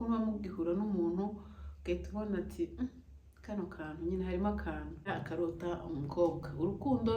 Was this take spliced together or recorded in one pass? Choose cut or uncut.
cut